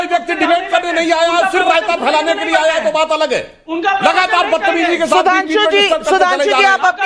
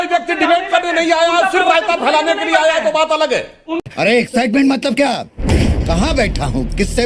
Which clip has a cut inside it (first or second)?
first